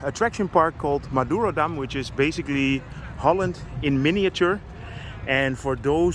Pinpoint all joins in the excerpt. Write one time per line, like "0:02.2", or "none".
none